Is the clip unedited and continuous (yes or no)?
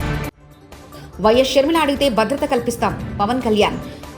yes